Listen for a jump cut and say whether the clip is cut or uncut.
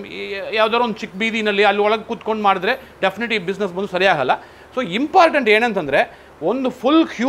uncut